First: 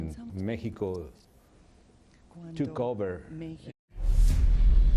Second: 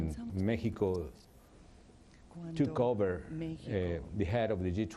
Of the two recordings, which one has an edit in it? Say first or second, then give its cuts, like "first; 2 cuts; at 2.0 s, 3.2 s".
second; 1 cut; at 3.6 s